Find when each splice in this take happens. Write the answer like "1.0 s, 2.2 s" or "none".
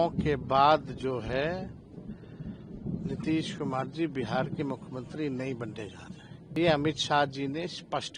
6.6 s